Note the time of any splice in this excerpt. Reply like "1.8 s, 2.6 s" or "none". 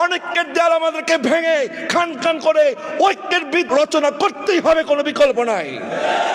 3.7 s